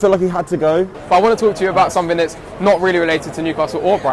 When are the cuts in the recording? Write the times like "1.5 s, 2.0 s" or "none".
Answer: 1.0 s